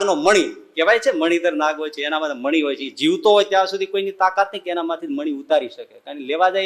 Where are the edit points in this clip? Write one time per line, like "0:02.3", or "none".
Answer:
none